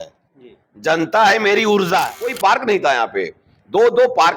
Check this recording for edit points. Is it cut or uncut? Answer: cut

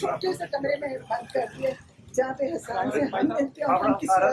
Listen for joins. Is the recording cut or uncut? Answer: uncut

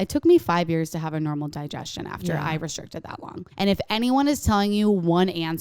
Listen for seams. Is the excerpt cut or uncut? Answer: cut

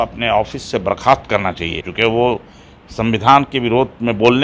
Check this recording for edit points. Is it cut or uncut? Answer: cut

